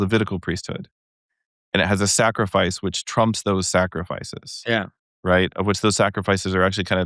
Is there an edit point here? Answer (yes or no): no